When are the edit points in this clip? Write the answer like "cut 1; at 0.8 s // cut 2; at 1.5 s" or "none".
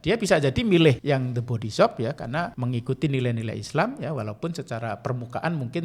cut 1; at 1.0 s // cut 2; at 2.6 s